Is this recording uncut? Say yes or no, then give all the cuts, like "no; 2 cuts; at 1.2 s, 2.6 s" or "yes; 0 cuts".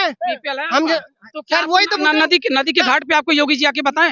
yes; 0 cuts